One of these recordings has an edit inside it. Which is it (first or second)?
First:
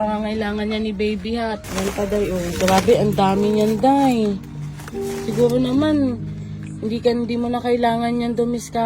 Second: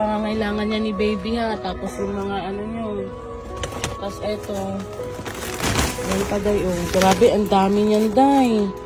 first